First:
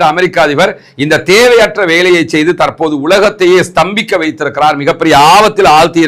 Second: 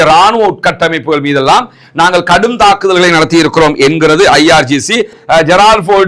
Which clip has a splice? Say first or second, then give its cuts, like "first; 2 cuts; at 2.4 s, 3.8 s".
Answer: second; 1 cut; at 5.1 s